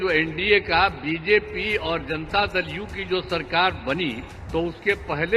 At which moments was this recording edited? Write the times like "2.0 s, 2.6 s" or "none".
4.3 s